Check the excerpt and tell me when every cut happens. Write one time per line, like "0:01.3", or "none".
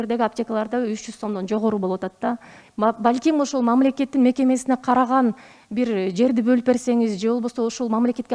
none